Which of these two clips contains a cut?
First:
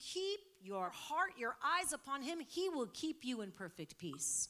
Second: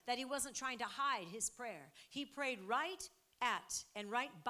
first; 1 cut; at 1.0 s

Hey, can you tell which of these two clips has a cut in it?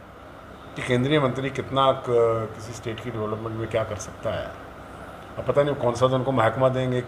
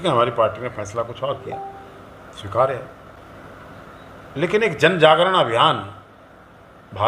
second; 1 cut; at 3.2 s

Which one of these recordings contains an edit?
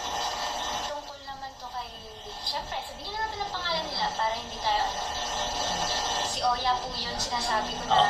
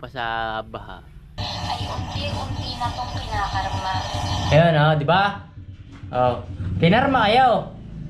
second; 1 cut; at 1.4 s

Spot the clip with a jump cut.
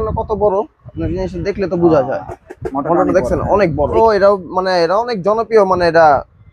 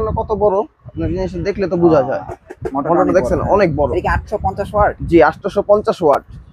first; 1 cut; at 4.0 s

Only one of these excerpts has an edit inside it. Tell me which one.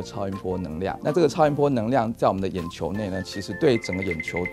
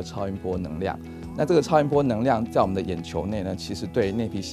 first; 2 cuts; at 1.0 s, 3.4 s

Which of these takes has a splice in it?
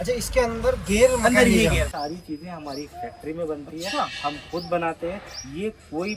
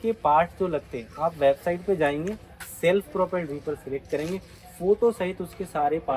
first; 1 cut; at 1.9 s

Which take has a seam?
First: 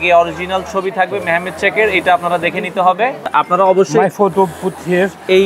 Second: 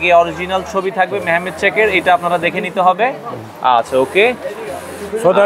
first; 1 cut; at 3.2 s

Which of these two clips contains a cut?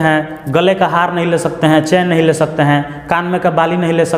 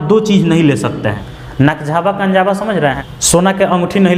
second; 2 cuts; at 1.2 s, 3.0 s

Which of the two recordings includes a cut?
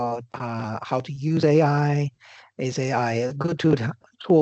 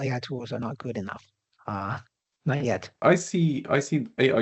second; 1 cut; at 3.0 s

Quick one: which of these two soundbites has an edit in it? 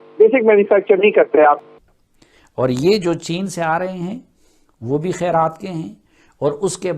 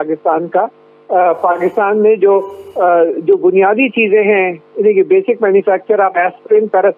first; 1 cut; at 1.7 s

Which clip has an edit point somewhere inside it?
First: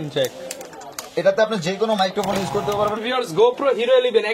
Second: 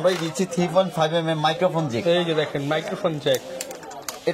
first; 1 cut; at 3.0 s

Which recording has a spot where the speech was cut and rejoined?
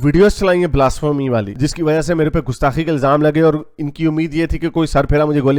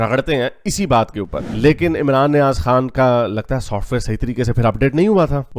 second; 1 cut; at 1.4 s

